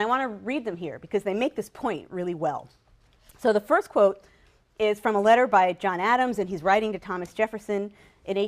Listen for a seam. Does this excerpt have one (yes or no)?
yes